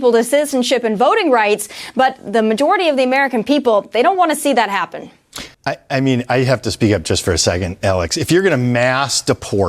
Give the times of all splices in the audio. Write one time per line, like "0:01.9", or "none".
0:05.4